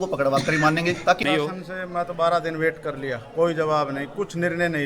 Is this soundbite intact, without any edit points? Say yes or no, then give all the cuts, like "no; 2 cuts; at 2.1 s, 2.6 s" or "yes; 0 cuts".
no; 1 cut; at 1.2 s